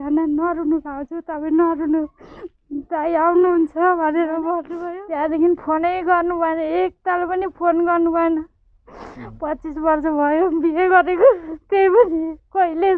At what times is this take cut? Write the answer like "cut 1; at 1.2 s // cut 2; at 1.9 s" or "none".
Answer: cut 1; at 4.7 s